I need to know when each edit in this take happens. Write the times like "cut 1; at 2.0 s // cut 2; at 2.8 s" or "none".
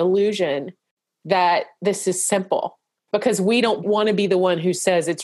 cut 1; at 2.9 s // cut 2; at 3.8 s